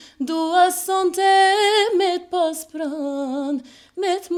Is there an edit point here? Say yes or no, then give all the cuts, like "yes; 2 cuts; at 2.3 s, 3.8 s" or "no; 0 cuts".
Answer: no; 0 cuts